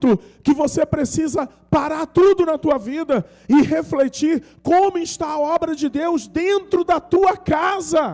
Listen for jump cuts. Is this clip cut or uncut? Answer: uncut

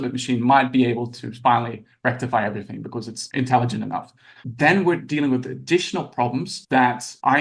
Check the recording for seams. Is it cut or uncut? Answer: uncut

